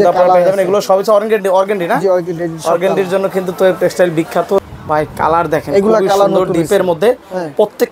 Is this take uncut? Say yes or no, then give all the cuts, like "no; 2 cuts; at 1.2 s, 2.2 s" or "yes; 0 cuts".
no; 1 cut; at 4.7 s